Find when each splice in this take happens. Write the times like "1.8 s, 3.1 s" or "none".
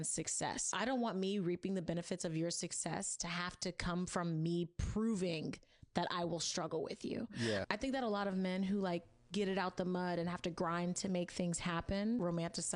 1.1 s

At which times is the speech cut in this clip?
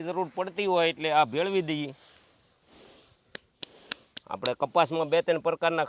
none

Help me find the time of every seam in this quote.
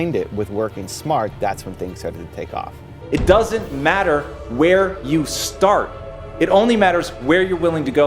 2.9 s

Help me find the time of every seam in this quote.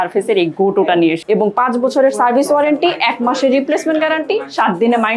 1.2 s

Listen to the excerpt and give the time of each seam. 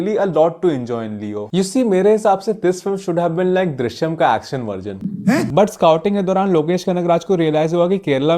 1.4 s, 5.5 s

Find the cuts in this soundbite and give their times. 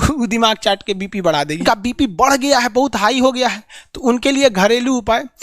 1.6 s

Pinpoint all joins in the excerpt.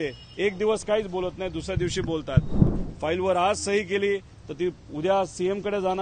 2.7 s

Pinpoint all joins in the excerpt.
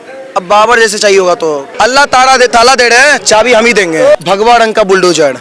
1.7 s, 4.1 s

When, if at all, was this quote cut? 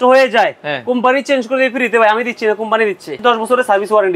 3.2 s

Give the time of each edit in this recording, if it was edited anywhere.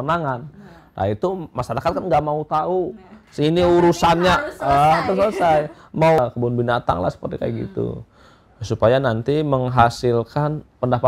6.2 s

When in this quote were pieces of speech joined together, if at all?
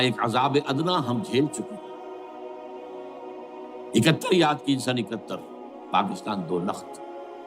none

